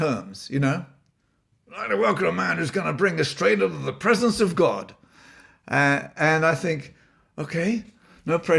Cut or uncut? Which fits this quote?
uncut